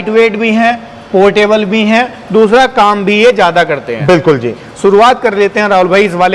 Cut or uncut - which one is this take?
uncut